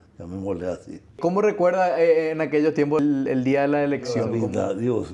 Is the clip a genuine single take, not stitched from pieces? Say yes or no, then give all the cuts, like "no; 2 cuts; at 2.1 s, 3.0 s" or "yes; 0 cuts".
no; 3 cuts; at 1.2 s, 3.0 s, 4.3 s